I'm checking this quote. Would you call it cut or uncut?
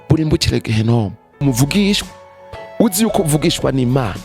cut